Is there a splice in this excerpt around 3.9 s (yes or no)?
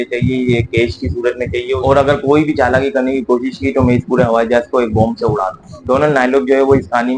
no